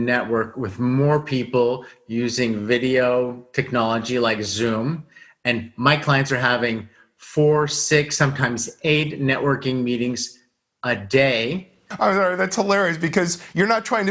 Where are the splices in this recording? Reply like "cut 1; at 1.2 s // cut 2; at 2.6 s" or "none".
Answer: cut 1; at 11.8 s